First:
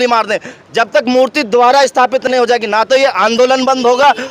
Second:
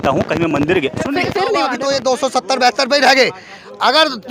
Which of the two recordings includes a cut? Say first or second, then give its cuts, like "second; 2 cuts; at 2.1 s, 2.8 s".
second; 1 cut; at 1.7 s